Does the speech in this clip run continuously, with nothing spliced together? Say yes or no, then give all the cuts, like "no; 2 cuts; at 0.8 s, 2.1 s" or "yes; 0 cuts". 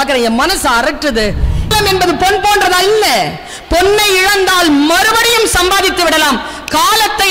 no; 1 cut; at 1.7 s